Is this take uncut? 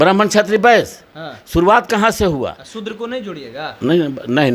yes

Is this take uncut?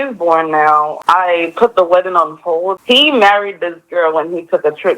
no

